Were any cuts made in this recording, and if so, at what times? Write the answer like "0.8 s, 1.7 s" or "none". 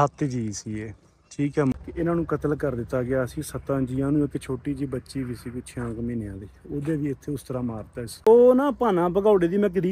1.7 s, 8.2 s